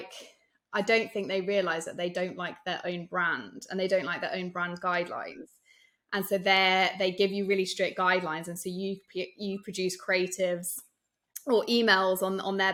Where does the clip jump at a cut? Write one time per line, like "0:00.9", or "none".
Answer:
none